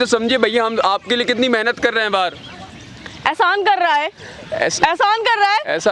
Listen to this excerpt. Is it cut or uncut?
uncut